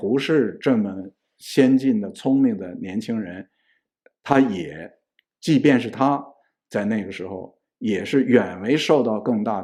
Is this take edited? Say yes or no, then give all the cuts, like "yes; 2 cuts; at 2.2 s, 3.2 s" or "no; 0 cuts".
no; 0 cuts